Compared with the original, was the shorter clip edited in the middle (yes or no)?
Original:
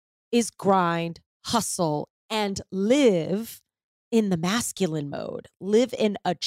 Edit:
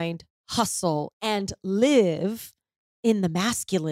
yes